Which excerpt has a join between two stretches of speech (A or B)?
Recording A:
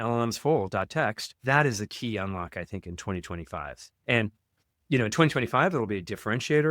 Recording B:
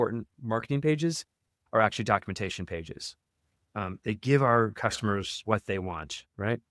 A